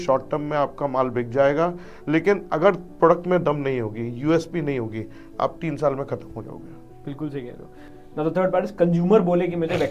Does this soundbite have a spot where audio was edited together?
no; 0 cuts

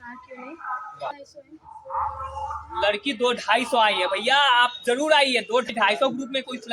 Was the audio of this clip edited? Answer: yes; 2 cuts; at 1.1 s, 5.7 s

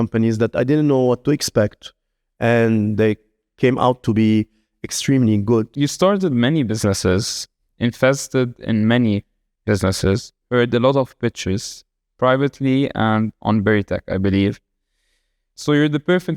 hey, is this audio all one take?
no; 1 cut; at 5.7 s

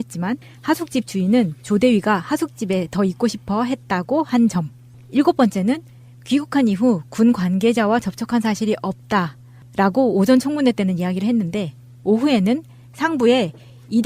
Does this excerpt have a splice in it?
yes; 1 cut; at 6.8 s

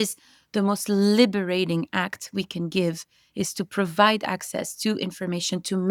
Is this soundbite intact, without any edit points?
yes; 0 cuts

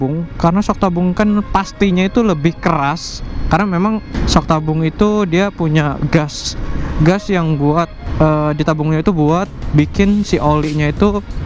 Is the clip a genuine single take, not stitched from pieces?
yes; 0 cuts

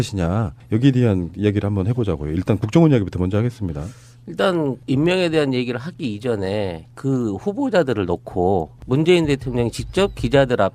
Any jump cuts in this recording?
yes; 1 cut; at 7.2 s

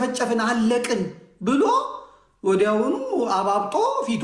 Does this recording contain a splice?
no; 0 cuts

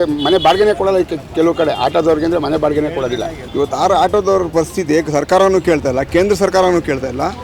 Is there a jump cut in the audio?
yes; 1 cut; at 3.4 s

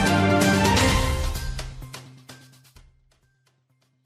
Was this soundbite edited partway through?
yes; 1 cut; at 3.0 s

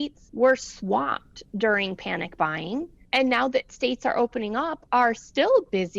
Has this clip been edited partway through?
no; 0 cuts

